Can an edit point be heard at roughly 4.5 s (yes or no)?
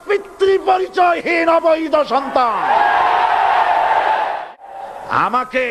yes